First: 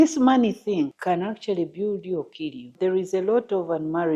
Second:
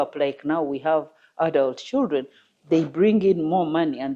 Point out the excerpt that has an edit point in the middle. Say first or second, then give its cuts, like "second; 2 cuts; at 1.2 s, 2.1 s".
first; 2 cuts; at 1.0 s, 2.7 s